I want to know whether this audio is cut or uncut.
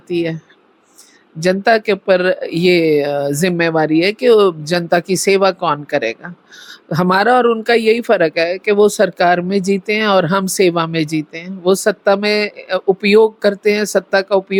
uncut